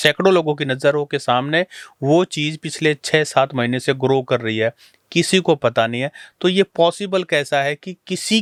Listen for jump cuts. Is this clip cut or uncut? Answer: uncut